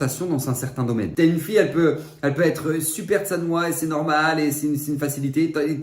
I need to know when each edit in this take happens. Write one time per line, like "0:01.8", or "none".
0:01.1